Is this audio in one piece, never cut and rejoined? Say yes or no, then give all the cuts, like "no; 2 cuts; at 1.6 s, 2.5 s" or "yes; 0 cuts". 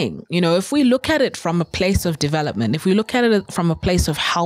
yes; 0 cuts